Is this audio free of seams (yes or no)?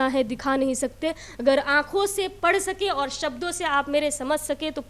yes